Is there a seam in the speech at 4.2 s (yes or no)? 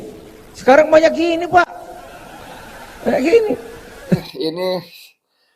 yes